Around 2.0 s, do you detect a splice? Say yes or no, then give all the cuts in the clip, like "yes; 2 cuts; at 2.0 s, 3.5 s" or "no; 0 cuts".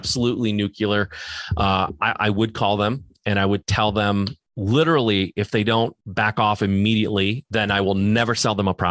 no; 3 cuts; at 4.5 s, 6.0 s, 7.4 s